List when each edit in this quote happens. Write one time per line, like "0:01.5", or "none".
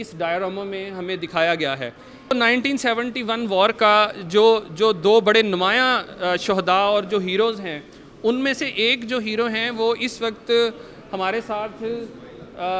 0:02.3